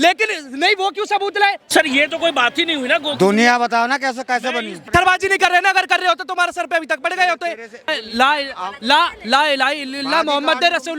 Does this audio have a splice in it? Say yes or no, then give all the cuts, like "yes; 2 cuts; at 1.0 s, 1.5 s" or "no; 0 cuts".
yes; 3 cuts; at 1.6 s, 4.9 s, 7.9 s